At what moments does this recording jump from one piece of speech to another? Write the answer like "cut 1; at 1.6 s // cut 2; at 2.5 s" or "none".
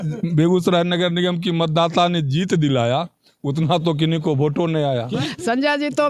cut 1; at 5.2 s